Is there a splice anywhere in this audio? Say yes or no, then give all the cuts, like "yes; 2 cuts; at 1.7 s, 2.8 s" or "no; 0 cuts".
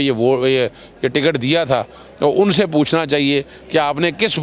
no; 0 cuts